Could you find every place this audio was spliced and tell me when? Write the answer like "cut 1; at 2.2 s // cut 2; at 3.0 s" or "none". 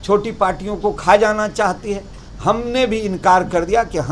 cut 1; at 2.2 s